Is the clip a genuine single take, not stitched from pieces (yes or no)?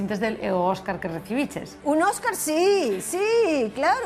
no